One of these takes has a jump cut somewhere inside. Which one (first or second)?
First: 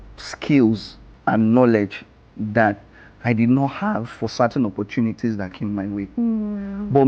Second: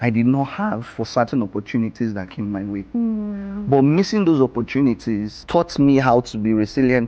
second